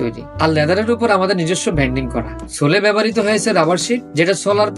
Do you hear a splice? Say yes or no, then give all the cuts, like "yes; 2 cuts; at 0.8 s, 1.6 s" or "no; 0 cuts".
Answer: no; 0 cuts